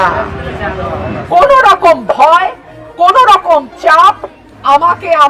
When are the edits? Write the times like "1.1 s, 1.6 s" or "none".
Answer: 1.4 s